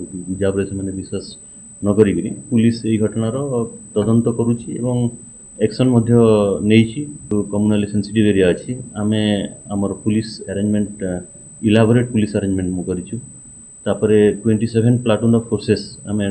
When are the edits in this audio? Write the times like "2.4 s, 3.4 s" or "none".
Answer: 7.3 s

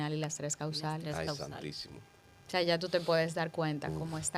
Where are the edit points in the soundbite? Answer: none

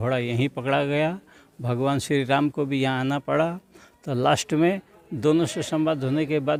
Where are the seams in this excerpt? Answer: none

